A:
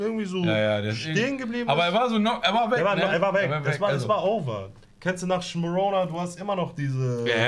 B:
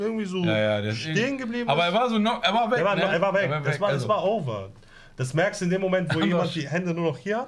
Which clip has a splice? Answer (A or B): A